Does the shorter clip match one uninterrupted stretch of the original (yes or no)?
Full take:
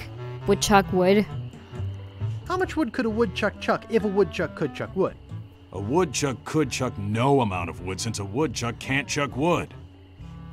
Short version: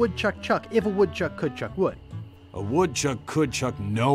yes